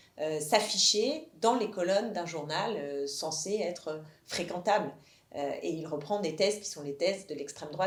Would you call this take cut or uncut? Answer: uncut